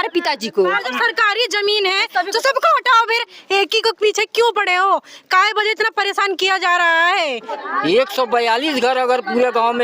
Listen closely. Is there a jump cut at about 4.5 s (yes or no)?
no